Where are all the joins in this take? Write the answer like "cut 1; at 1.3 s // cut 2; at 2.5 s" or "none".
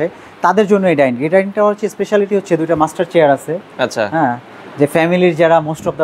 none

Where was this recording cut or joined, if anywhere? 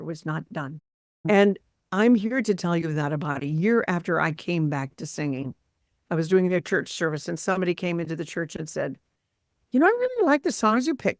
cut 1; at 1.2 s

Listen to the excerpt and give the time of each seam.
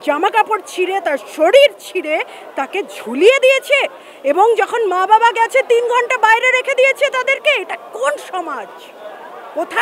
none

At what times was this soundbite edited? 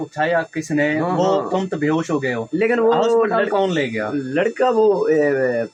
none

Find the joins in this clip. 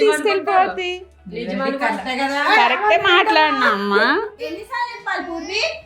cut 1; at 4.4 s

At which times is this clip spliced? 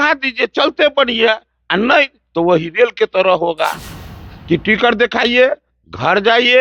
none

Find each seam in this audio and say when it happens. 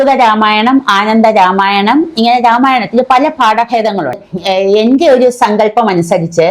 cut 1; at 4.1 s

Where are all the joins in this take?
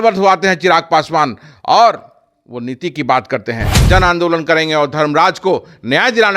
cut 1; at 3.7 s

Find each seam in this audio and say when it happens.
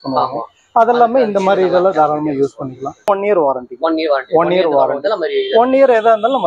cut 1; at 3.1 s

